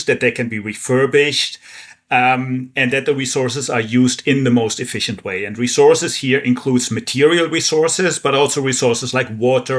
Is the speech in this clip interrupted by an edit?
no; 0 cuts

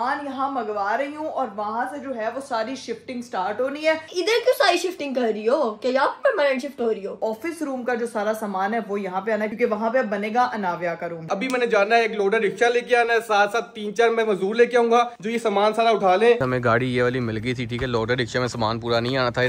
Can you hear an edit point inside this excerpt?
yes; 5 cuts; at 4.1 s, 7.2 s, 9.5 s, 11.3 s, 16.4 s

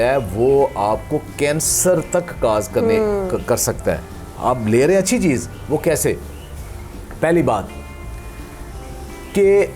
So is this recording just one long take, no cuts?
yes; 0 cuts

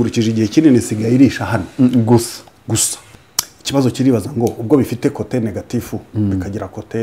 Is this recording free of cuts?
no; 1 cut; at 2.9 s

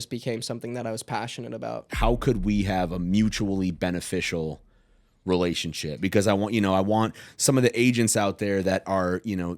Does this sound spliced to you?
yes; 1 cut; at 1.9 s

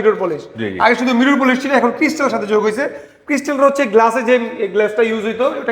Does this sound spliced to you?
no; 0 cuts

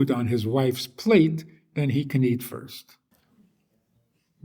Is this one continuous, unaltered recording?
no; 1 cut; at 3.1 s

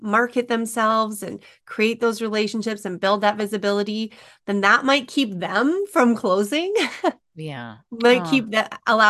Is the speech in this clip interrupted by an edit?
no; 0 cuts

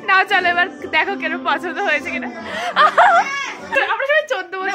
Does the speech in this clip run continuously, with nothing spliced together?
no; 1 cut; at 3.7 s

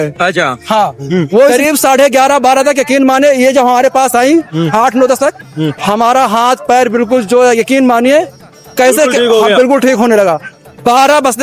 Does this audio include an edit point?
yes; 1 cut; at 1.5 s

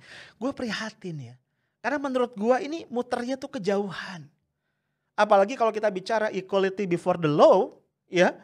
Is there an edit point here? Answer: no; 0 cuts

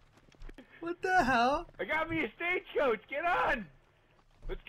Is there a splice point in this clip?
yes; 1 cut; at 1.7 s

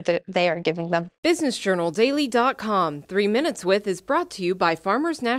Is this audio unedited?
no; 1 cut; at 1.1 s

